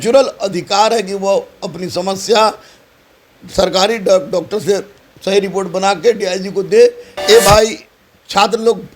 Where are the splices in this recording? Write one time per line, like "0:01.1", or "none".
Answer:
0:07.1